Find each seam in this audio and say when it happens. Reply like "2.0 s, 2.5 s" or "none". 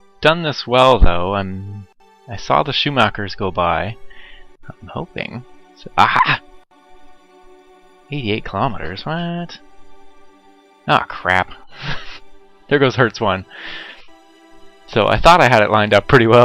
13.3 s